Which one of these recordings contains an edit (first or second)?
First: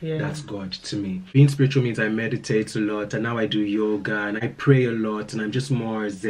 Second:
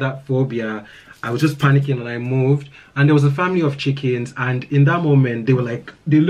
first